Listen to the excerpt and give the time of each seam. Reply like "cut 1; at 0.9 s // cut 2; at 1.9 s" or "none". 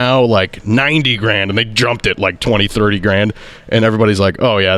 none